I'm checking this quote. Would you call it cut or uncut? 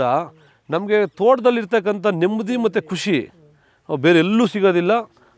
uncut